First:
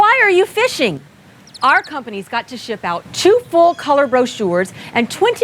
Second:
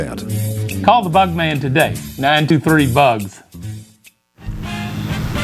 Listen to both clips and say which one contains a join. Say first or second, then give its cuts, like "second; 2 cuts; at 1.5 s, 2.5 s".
second; 1 cut; at 4.1 s